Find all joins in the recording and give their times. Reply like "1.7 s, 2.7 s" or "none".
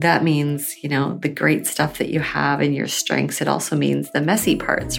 none